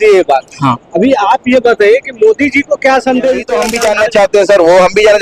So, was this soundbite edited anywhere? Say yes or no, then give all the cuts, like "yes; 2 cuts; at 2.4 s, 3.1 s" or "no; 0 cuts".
yes; 1 cut; at 3.6 s